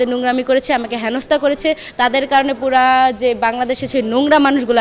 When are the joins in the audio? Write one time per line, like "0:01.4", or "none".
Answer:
none